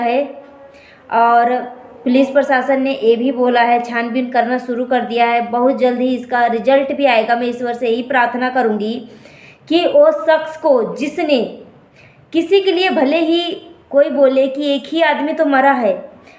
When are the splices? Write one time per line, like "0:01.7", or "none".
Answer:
none